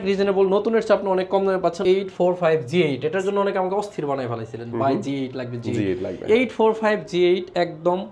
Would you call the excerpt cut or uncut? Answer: cut